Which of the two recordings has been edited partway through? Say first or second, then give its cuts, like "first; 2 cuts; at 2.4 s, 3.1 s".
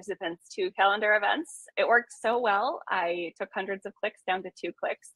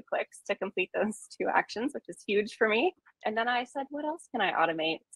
first; 1 cut; at 1.6 s